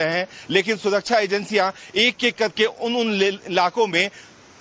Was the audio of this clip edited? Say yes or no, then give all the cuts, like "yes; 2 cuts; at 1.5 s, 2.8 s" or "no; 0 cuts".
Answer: yes; 1 cut; at 1.0 s